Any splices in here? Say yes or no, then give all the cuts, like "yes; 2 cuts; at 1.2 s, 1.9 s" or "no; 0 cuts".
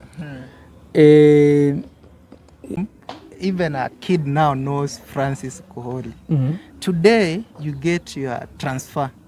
yes; 1 cut; at 2.8 s